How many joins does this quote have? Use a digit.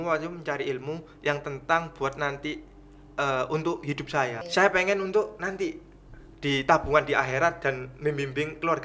1